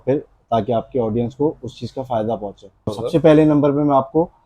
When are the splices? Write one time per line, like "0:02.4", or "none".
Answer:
0:02.9